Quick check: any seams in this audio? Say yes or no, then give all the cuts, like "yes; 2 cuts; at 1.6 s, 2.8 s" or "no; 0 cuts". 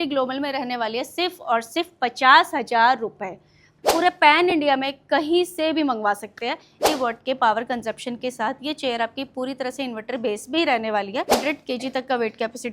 yes; 3 cuts; at 3.6 s, 6.8 s, 11.3 s